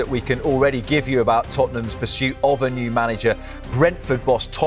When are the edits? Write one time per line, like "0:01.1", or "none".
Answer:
none